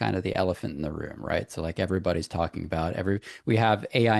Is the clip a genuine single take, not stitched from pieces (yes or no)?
yes